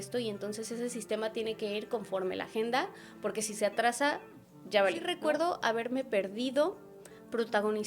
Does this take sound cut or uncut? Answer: cut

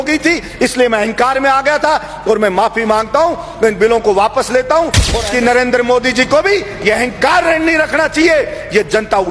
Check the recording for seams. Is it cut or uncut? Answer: cut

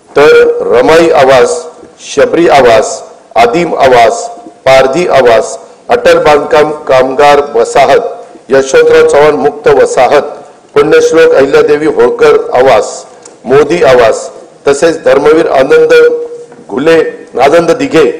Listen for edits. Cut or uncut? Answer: uncut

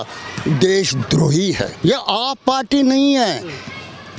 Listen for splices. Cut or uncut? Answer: cut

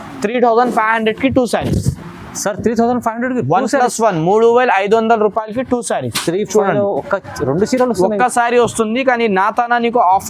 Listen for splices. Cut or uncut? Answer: uncut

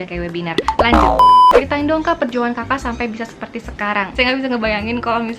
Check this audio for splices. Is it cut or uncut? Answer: cut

